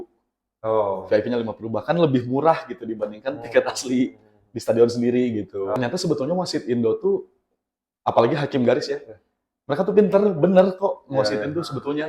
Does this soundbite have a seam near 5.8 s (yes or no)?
yes